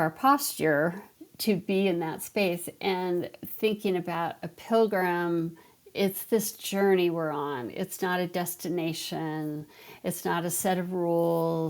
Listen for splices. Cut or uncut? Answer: cut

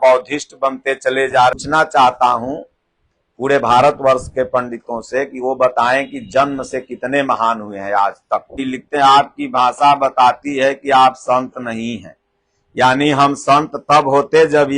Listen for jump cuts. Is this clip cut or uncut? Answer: cut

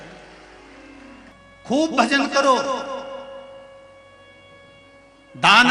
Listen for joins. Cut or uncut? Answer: cut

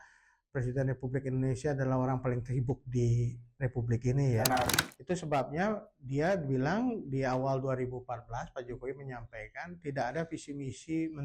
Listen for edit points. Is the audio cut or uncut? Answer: cut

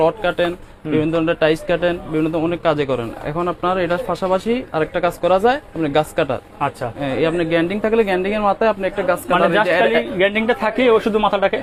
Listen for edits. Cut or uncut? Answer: uncut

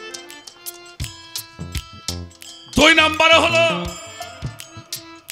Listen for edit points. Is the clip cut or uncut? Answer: uncut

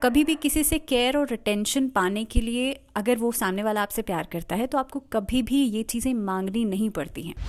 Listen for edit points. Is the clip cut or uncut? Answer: uncut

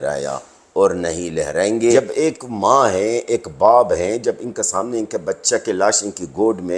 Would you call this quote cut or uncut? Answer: cut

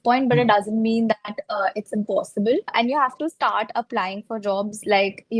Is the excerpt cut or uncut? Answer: cut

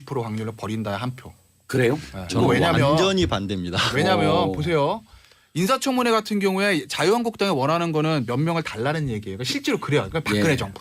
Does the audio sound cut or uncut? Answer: cut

